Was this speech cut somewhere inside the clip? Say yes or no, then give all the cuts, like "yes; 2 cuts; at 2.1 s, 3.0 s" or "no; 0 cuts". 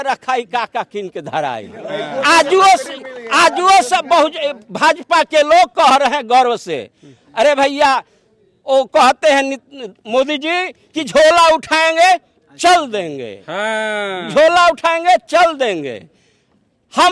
no; 0 cuts